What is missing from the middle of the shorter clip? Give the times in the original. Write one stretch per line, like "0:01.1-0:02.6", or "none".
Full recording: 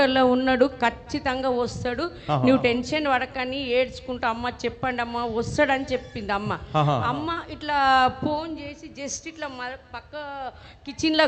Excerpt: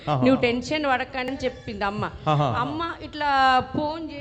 0:03.5-0:05.8